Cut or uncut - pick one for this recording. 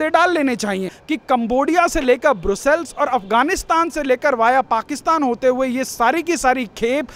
cut